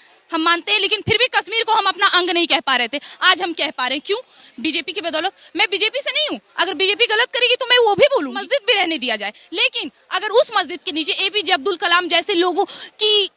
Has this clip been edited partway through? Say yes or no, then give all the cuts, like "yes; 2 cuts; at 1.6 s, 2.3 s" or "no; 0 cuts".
yes; 1 cut; at 8.5 s